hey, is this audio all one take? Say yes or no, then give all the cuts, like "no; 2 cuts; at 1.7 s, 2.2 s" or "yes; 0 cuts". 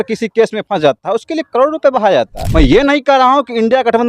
no; 1 cut; at 2.4 s